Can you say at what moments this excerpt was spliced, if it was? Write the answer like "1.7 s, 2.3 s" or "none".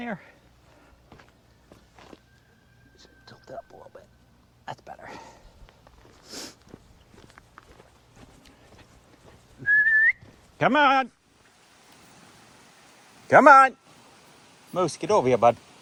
none